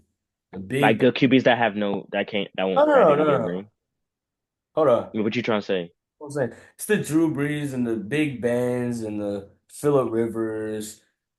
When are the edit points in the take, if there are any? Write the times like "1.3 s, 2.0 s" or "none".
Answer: none

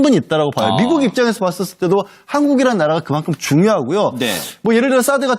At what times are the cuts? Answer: 2.4 s

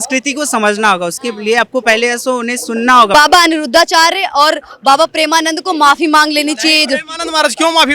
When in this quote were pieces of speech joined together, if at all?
3.1 s

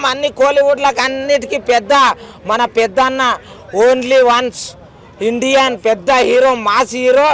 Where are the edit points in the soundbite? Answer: none

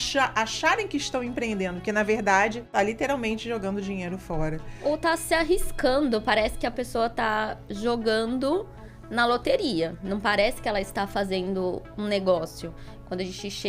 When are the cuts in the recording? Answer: 2.6 s

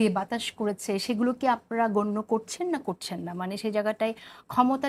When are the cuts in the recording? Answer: none

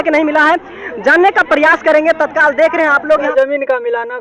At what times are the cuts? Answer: 3.3 s

